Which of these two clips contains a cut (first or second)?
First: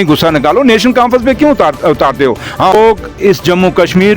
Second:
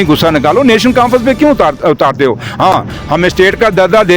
first